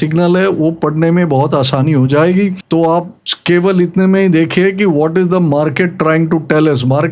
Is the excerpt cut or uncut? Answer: uncut